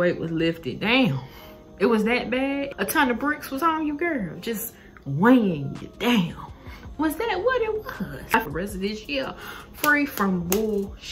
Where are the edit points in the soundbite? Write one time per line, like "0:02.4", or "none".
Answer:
0:08.5